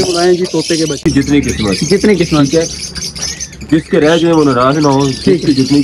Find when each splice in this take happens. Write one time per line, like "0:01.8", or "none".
0:01.0